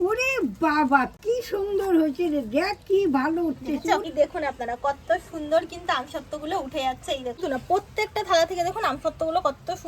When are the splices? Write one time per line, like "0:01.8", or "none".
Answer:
0:04.1
0:07.4